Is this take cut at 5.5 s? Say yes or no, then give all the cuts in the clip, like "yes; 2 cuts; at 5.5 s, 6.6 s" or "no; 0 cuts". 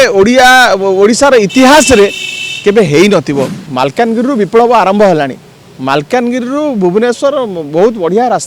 no; 1 cut; at 3.6 s